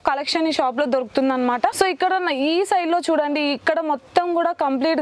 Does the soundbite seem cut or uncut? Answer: uncut